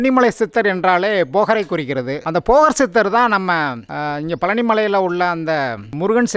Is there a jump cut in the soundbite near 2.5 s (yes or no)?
no